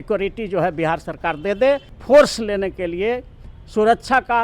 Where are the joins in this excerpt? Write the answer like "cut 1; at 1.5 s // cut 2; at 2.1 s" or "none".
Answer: cut 1; at 1.9 s